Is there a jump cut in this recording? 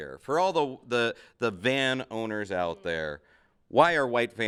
no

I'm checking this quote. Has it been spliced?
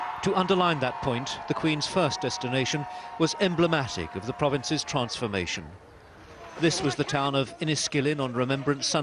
yes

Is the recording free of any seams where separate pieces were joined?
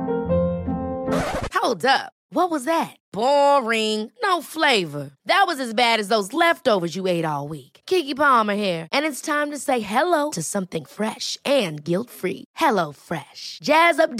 yes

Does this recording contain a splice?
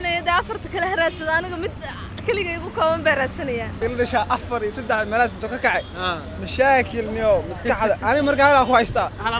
yes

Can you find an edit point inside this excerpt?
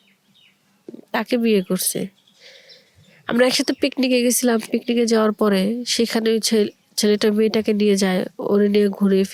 no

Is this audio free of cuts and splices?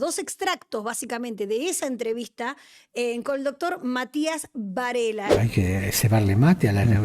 no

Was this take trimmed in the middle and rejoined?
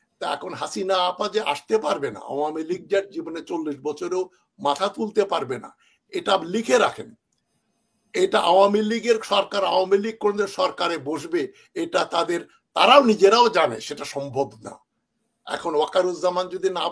no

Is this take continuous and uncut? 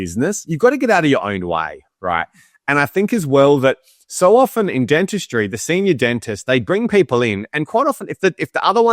yes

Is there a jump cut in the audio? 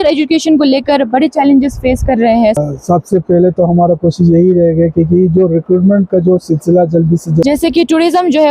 yes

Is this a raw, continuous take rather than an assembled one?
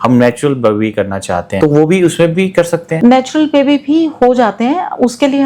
no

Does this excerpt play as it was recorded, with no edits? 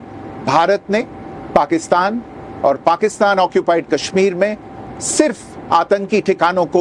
no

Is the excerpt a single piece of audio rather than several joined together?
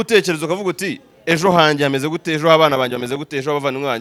yes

